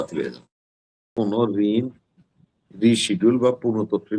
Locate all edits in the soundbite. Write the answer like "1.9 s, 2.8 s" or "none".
1.1 s